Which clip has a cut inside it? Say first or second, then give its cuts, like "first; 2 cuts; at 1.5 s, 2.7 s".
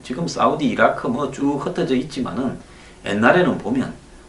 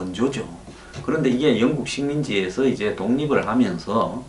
first; 1 cut; at 1.9 s